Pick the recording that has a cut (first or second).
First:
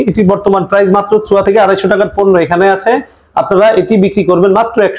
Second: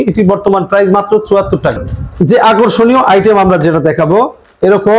first